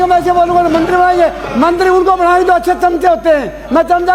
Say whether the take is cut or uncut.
uncut